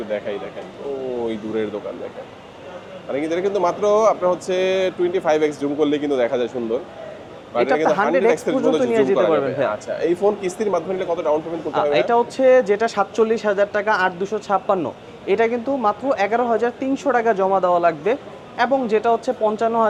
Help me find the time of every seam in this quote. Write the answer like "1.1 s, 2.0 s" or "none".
none